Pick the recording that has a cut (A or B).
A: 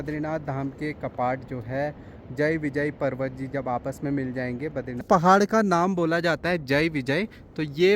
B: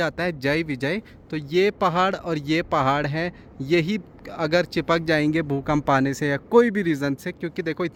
A